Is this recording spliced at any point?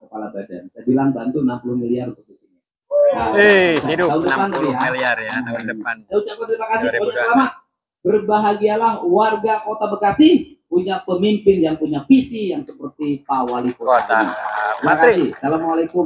no; 0 cuts

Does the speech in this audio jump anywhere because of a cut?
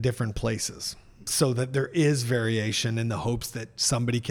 yes; 1 cut; at 1.1 s

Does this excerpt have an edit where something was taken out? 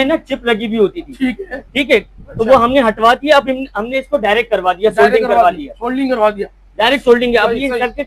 no; 0 cuts

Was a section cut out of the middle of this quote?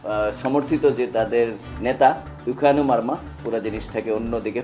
yes; 1 cut; at 3.4 s

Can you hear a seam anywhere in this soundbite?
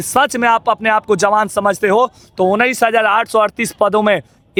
no; 0 cuts

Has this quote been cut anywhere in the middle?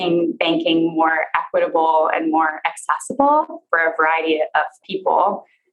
yes; 2 cuts; at 3.6 s, 4.8 s

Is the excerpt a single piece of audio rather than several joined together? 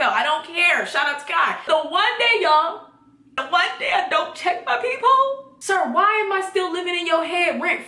no; 3 cuts; at 1.7 s, 3.3 s, 5.5 s

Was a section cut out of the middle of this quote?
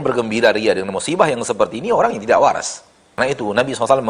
yes; 1 cut; at 3.2 s

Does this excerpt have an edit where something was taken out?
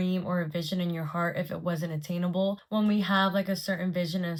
no; 0 cuts

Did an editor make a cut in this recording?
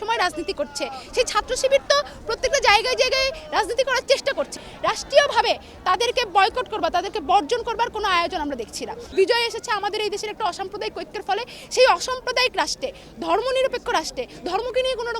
yes; 3 cuts; at 1.0 s, 4.5 s, 9.1 s

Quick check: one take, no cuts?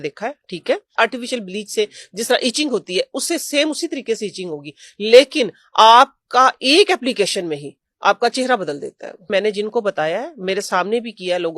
no; 2 cuts; at 1.0 s, 9.3 s

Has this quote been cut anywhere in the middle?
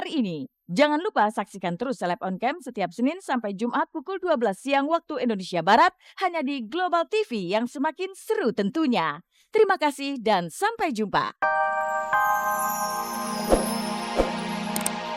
yes; 1 cut; at 11.3 s

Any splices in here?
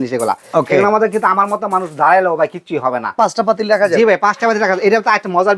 yes; 1 cut; at 3.1 s

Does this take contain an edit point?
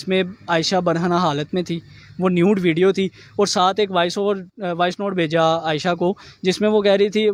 no; 0 cuts

